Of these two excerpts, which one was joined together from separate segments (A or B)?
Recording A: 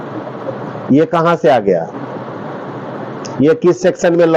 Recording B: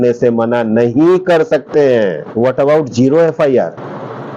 B